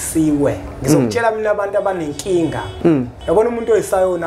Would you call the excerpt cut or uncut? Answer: cut